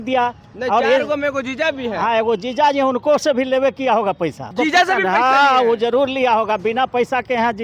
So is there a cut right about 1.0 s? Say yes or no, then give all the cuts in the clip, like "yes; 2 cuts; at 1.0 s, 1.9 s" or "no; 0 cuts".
no; 1 cut; at 4.5 s